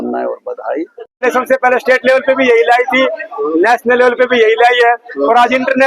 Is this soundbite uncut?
no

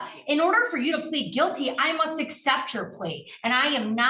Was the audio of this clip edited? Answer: no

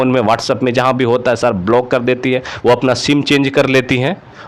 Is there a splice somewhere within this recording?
no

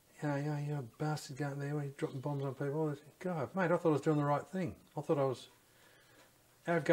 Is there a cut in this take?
no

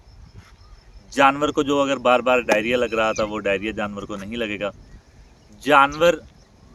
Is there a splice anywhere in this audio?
no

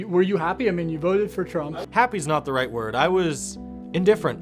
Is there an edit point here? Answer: yes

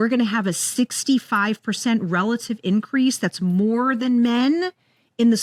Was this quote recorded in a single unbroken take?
yes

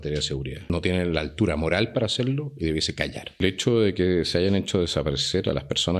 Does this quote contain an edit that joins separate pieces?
yes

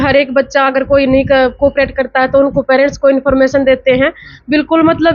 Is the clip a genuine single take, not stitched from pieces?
yes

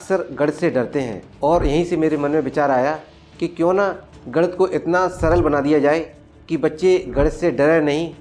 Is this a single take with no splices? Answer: yes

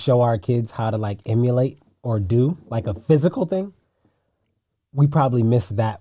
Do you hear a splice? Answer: no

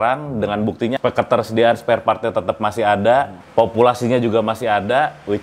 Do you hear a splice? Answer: yes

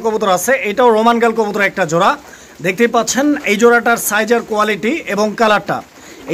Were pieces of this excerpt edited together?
no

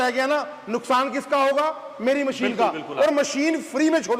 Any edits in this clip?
no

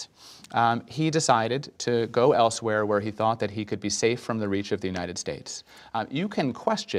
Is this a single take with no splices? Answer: yes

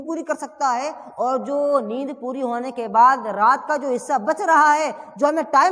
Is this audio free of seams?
yes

